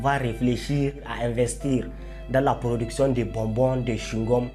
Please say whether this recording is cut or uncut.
uncut